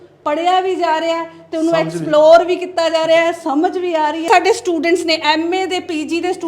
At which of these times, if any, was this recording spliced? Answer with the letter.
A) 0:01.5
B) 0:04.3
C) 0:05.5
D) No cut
B